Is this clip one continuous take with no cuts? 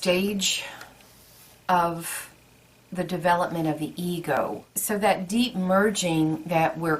no; 1 cut; at 4.4 s

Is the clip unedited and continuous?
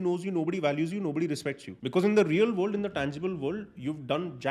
no; 1 cut; at 1.7 s

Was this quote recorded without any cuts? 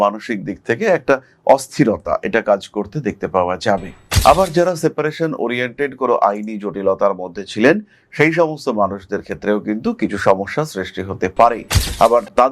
no; 1 cut; at 4.1 s

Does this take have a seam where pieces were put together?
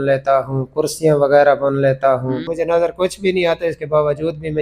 yes; 1 cut; at 2.4 s

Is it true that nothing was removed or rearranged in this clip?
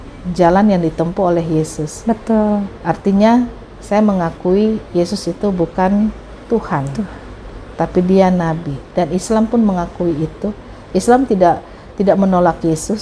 yes; 0 cuts

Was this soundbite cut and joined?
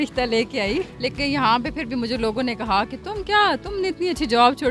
yes; 1 cut; at 0.9 s

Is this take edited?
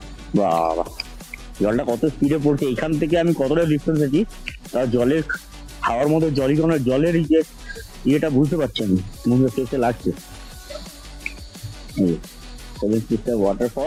no; 0 cuts

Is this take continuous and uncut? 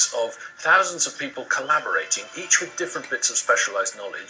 yes; 0 cuts

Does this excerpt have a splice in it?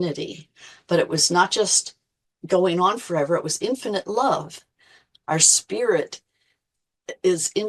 yes; 1 cut; at 5.1 s

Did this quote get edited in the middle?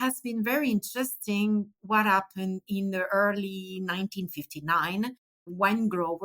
yes; 1 cut; at 5.3 s

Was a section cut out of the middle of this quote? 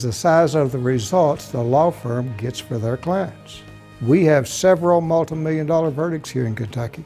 no; 0 cuts

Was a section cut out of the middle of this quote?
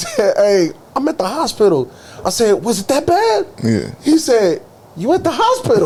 no; 0 cuts

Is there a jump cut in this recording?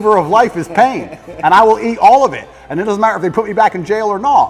no; 0 cuts

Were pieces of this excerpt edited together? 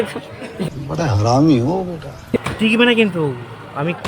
yes; 1 cut; at 2.4 s

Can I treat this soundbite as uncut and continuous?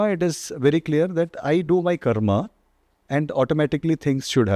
yes; 0 cuts

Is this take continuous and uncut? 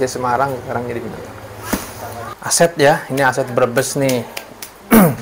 no; 1 cut; at 2.0 s

